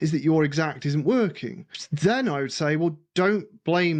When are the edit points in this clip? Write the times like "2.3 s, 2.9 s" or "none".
none